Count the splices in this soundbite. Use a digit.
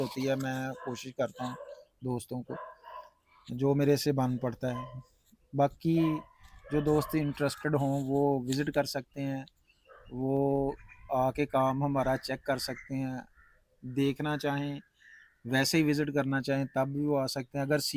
0